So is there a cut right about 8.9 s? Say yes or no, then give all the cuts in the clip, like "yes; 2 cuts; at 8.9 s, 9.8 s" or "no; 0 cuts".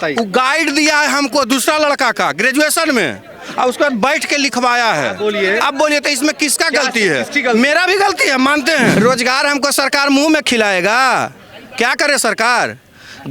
yes; 1 cut; at 8.9 s